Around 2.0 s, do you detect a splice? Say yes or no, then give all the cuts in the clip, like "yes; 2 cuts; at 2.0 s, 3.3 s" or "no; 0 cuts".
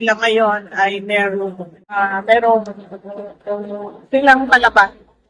yes; 1 cut; at 2.0 s